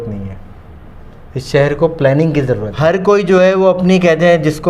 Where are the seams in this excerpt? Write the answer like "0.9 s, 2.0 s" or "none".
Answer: 2.7 s